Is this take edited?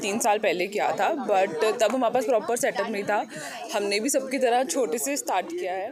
no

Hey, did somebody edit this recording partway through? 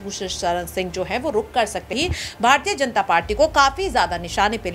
yes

